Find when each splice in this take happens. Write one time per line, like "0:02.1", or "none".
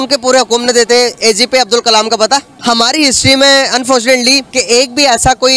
0:02.5